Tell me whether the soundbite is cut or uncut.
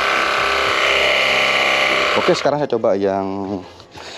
uncut